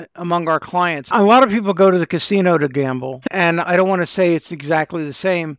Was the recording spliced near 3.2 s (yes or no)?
yes